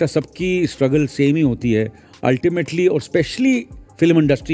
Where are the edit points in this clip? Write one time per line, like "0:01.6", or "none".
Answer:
none